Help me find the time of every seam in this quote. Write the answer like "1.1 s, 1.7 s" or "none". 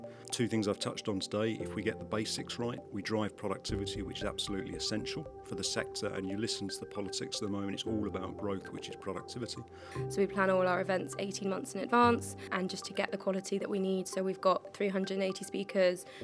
10.0 s, 12.5 s

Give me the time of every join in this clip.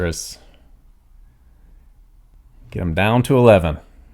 2.3 s

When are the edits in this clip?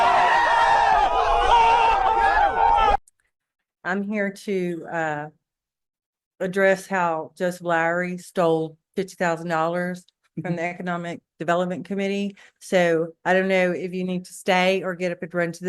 3.1 s

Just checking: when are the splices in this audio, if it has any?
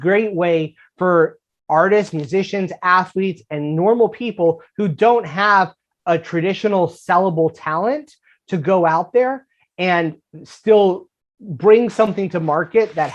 none

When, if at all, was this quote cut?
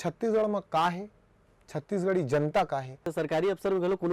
3.0 s

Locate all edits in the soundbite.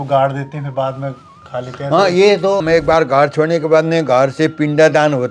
2.6 s

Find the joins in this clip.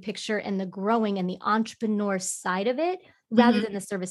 none

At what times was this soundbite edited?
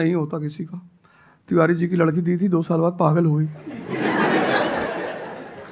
none

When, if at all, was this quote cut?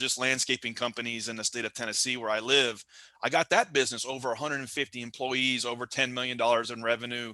none

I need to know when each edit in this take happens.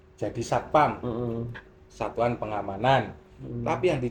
none

